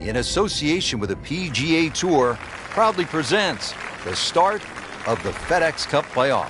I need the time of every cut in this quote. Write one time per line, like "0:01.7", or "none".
none

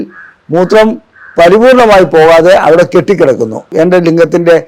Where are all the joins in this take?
0:03.6

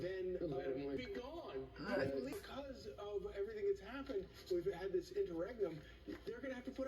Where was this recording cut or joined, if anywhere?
0:01.0
0:02.3

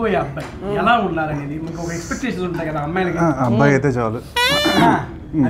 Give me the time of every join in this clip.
none

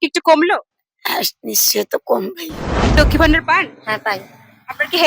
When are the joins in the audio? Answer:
0:03.0

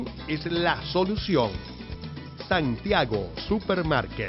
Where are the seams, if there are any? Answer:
none

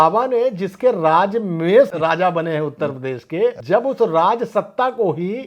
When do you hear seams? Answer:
0:01.9
0:03.6

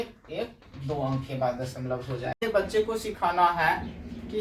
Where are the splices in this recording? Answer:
0:02.4

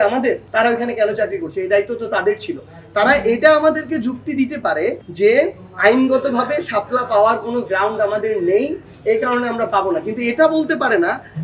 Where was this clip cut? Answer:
none

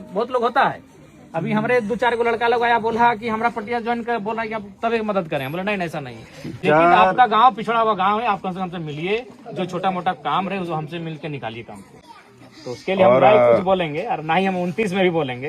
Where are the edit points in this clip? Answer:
0:06.6
0:12.0

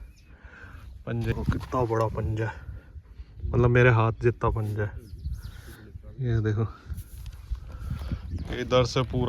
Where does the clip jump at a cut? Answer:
0:01.3

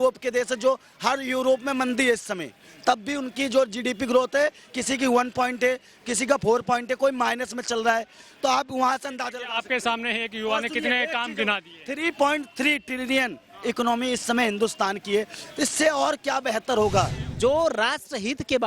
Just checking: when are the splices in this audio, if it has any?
0:17.3

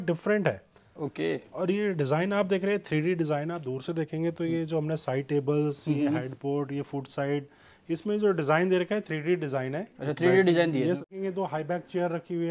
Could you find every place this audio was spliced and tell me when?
0:11.1

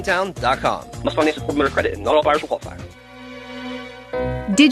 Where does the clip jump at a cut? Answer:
none

